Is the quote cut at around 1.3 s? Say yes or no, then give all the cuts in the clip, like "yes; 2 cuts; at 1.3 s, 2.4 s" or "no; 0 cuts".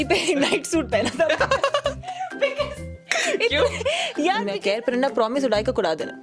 no; 1 cut; at 4.5 s